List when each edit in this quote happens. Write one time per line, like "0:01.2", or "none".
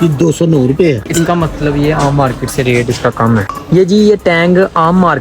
0:01.1
0:03.5